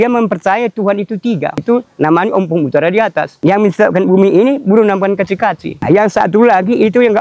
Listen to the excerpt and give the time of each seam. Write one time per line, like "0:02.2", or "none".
0:01.6
0:03.3
0:05.8

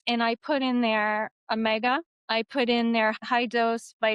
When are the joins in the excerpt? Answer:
0:02.1
0:03.1

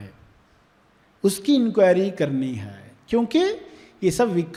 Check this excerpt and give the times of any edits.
none

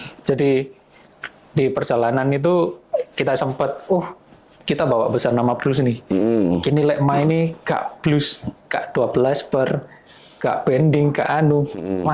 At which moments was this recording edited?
none

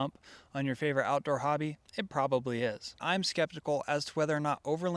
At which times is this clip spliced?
0:01.7
0:03.0

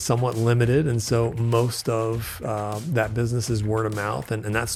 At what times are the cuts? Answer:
none

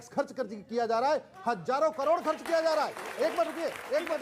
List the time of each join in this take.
none

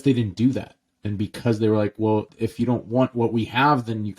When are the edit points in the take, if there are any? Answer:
0:02.3

